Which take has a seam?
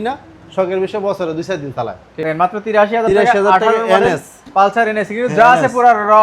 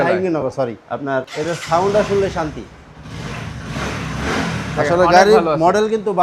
first; 1 cut; at 2.1 s

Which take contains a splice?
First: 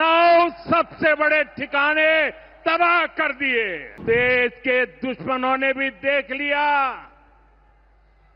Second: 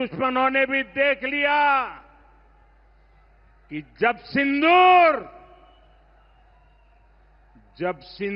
first; 1 cut; at 4.0 s

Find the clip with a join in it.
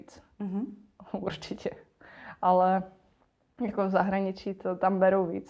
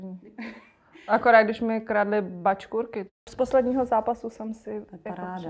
second; 1 cut; at 3.3 s

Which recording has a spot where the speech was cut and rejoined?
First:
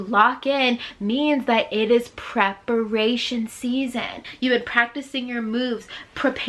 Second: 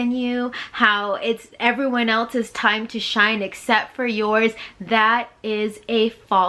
first; 1 cut; at 4.2 s

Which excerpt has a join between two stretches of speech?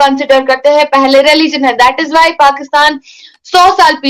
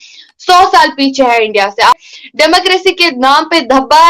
second; 1 cut; at 2.0 s

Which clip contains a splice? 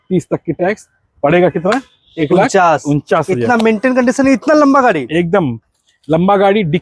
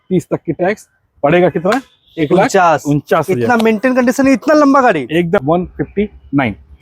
second; 1 cut; at 5.4 s

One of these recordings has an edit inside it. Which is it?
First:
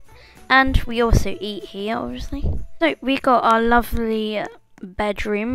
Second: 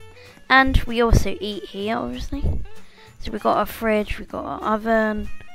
first; 1 cut; at 2.6 s

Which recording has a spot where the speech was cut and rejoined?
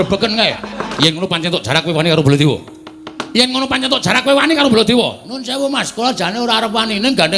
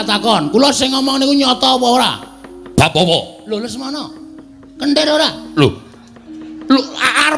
first; 1 cut; at 0.9 s

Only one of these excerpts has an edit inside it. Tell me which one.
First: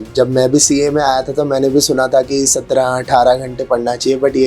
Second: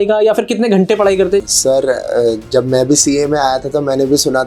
second; 1 cut; at 1.4 s

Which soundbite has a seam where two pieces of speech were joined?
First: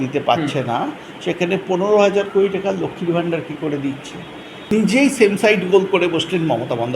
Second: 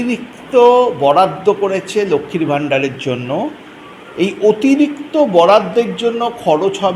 first; 1 cut; at 4.7 s

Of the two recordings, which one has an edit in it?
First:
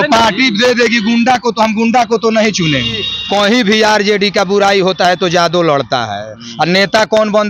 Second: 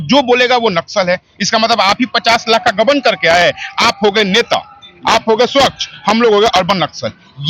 first; 1 cut; at 3.1 s

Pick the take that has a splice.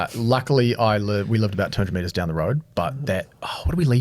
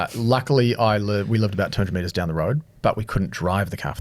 second; 1 cut; at 2.6 s

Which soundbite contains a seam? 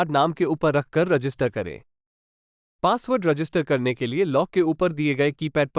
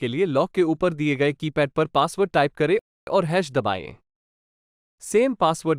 second; 1 cut; at 3.0 s

